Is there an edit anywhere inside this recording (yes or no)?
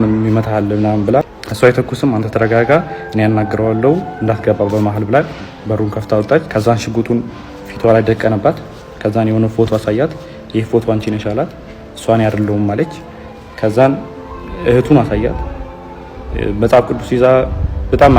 yes